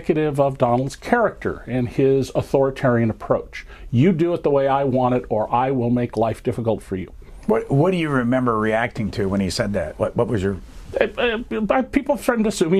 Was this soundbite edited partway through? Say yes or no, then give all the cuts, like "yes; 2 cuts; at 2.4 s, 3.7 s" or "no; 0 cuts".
no; 0 cuts